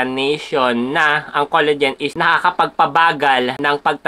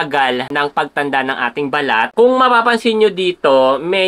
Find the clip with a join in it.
second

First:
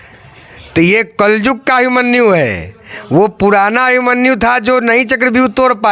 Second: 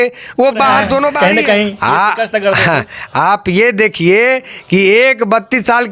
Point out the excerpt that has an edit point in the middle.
second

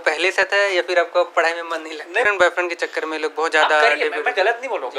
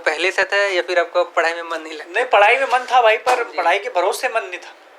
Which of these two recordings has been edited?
first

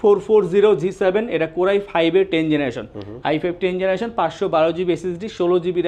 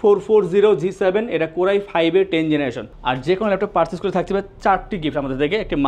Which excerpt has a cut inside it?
second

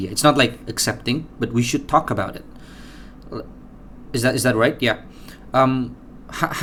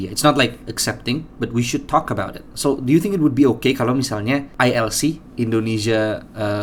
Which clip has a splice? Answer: second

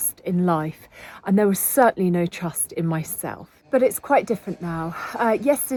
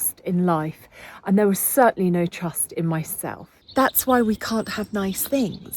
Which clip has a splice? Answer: second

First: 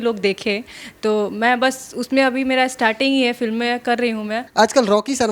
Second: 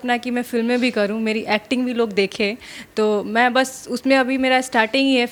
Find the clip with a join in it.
first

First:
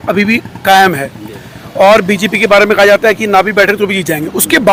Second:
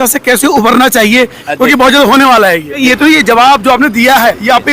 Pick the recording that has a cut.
second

